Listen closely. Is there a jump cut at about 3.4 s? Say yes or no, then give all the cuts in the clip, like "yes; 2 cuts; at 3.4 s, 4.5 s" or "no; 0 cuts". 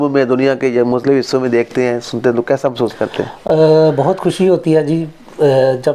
no; 0 cuts